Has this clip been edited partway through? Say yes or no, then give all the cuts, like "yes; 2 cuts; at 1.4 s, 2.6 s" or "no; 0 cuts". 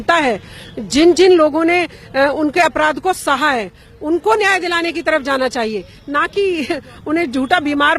no; 0 cuts